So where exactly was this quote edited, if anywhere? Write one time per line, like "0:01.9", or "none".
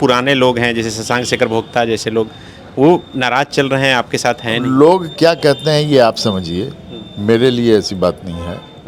none

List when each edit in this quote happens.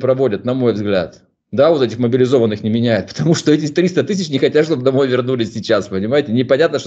none

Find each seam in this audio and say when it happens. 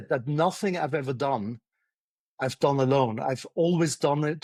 none

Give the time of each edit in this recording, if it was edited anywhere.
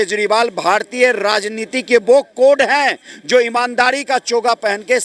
none

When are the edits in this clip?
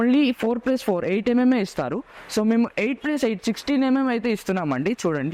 none

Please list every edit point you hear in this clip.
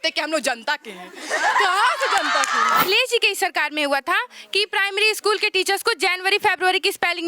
0:02.8

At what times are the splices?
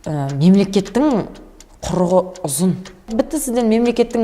0:03.1

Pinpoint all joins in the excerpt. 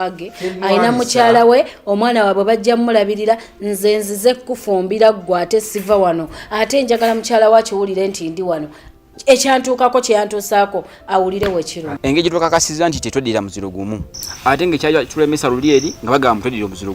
0:11.8

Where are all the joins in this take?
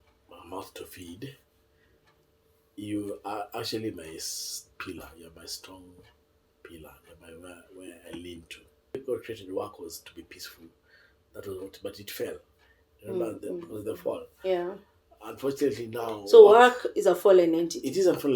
0:08.9

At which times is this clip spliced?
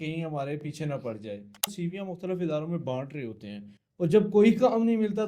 0:01.7

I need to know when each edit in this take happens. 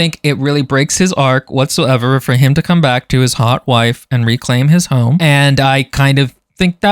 0:05.2

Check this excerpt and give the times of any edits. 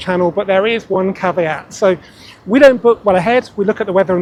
none

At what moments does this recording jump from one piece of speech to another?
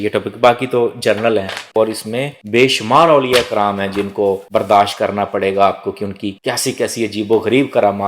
0:01.8

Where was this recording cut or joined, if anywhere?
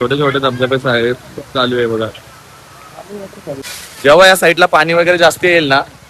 0:03.5

